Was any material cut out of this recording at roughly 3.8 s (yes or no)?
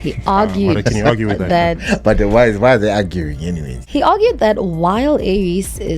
yes